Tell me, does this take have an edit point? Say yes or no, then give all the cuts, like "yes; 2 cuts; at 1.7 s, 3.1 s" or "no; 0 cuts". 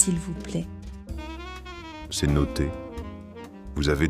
no; 0 cuts